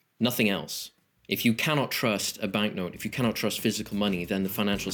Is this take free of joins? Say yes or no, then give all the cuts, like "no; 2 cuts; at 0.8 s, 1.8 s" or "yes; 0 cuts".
yes; 0 cuts